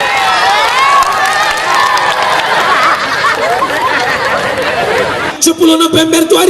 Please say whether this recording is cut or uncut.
cut